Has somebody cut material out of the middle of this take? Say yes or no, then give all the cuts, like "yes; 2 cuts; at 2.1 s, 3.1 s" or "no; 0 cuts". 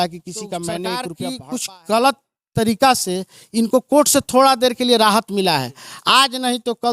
yes; 1 cut; at 1.1 s